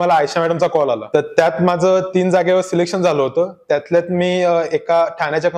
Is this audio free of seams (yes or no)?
no